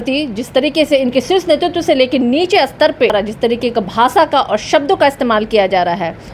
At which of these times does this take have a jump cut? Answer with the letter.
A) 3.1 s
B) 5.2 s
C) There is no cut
A